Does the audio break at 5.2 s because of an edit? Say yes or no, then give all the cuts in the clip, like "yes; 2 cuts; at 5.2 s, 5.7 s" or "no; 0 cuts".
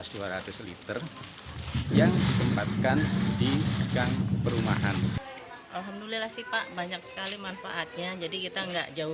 yes; 1 cut; at 5.2 s